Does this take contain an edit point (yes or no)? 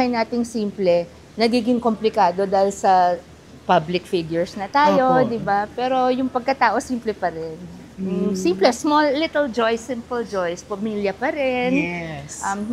no